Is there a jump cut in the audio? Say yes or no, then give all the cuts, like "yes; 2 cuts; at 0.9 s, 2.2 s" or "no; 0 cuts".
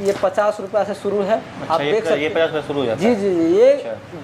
no; 0 cuts